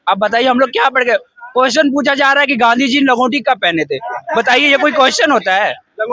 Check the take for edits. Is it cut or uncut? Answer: uncut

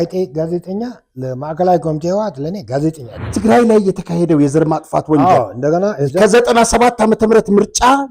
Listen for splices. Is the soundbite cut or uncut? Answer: cut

